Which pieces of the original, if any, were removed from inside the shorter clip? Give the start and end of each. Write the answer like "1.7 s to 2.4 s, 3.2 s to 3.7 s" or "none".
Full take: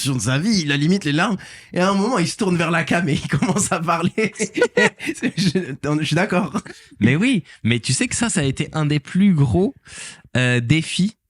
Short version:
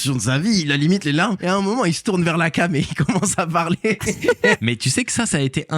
1.4 s to 1.7 s, 4.9 s to 7.6 s

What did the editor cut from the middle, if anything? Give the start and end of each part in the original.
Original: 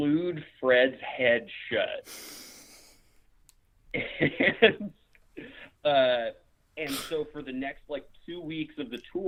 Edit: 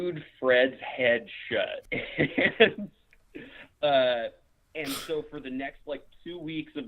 2.0 s to 3.8 s

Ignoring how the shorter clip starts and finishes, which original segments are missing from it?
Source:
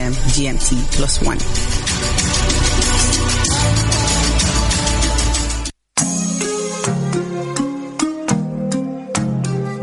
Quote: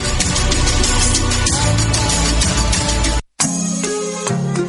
5.2 s to 5.8 s

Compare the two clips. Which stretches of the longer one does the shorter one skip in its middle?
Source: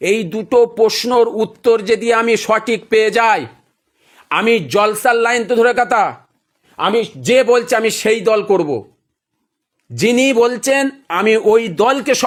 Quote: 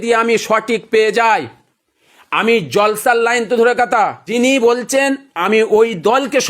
6.2 s to 10.0 s

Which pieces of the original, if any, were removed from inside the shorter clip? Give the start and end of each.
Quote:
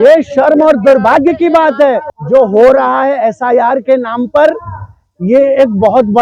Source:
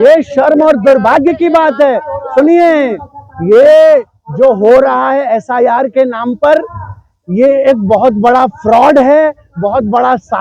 2.1 s to 4.2 s

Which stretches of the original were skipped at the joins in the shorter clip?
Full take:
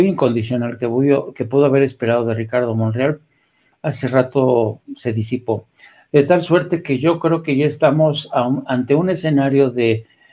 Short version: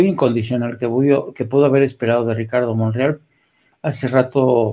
none

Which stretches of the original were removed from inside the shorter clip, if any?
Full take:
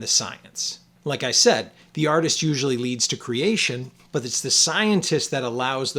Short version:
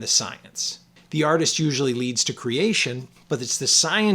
0.9 s to 1.7 s

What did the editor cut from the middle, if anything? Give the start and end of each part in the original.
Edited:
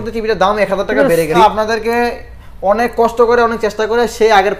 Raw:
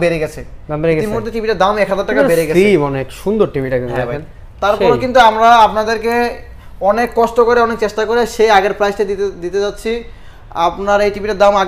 2.6 s to 5.6 s

